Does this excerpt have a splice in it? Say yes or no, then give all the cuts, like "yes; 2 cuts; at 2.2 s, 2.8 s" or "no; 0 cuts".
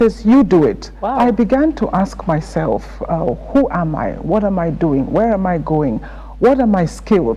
yes; 1 cut; at 1.1 s